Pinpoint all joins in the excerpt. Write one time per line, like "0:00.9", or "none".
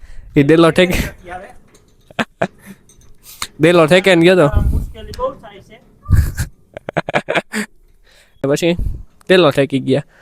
0:08.4